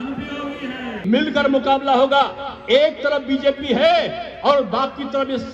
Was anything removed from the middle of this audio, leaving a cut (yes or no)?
yes